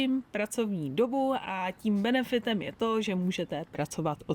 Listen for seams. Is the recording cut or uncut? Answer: uncut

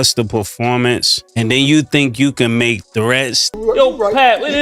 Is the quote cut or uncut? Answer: cut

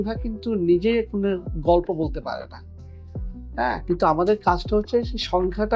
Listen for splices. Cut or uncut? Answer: uncut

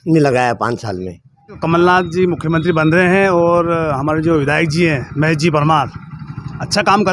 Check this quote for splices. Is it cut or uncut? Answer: cut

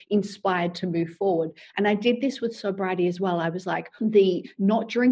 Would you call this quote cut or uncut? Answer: cut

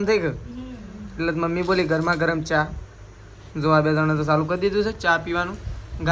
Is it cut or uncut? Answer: uncut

